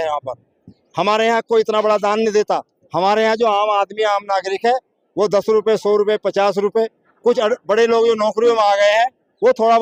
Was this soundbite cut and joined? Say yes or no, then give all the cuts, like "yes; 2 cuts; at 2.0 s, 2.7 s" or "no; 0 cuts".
no; 0 cuts